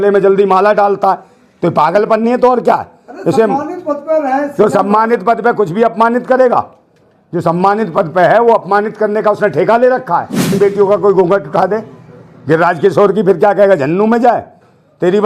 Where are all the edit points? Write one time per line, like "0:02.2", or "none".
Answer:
0:10.5